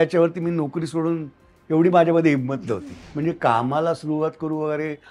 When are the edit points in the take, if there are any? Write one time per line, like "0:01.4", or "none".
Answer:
0:02.7